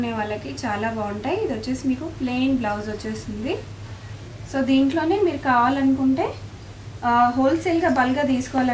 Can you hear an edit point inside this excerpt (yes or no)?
no